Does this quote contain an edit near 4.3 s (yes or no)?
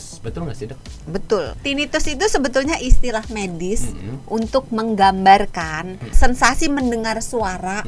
no